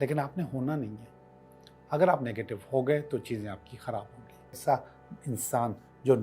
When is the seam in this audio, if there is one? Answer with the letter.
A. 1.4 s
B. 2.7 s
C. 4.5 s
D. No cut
C